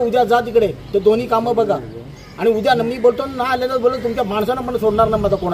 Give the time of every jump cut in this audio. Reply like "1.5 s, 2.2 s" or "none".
none